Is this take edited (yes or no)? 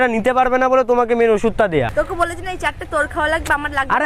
yes